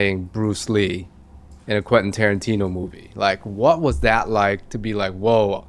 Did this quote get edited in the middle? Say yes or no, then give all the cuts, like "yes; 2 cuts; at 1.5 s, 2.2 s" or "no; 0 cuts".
no; 0 cuts